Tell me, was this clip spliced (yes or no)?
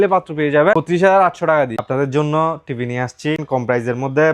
yes